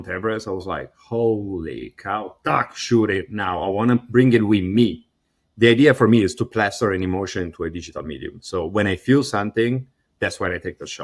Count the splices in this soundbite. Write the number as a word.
zero